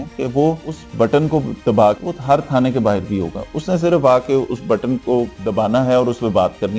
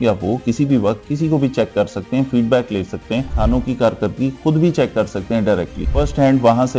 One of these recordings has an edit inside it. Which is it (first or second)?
second